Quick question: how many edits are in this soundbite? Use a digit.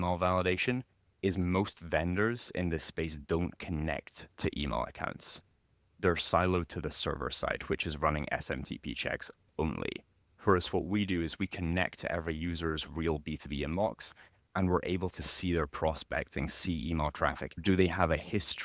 1